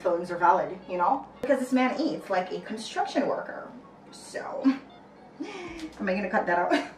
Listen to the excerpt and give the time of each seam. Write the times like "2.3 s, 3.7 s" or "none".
1.4 s